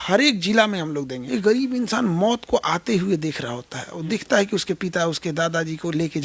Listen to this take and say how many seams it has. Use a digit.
1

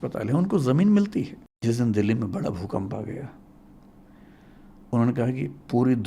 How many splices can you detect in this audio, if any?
1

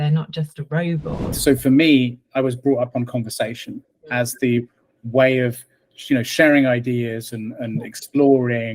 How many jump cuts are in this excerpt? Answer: 1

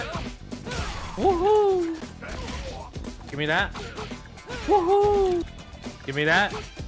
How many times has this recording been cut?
1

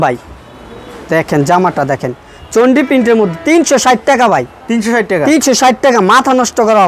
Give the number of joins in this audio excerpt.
0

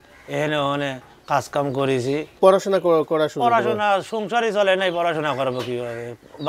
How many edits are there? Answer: 1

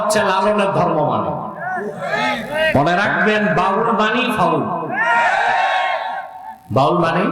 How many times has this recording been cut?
1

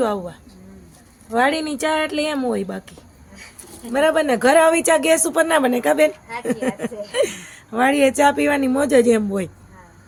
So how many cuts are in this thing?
0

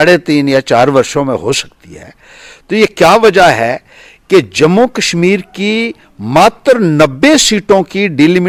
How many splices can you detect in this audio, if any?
0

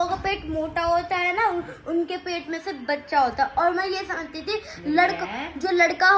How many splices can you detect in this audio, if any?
0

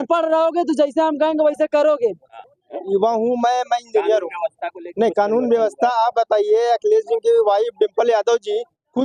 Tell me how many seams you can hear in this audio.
1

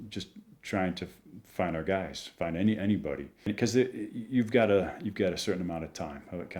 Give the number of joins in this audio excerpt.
1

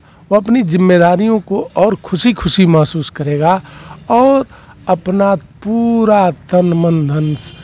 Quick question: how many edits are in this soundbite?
0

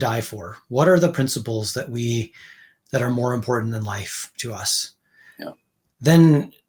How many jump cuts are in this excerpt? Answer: 0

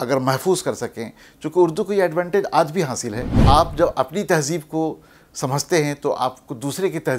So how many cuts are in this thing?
1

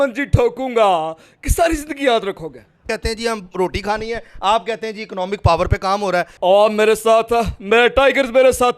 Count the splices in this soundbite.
2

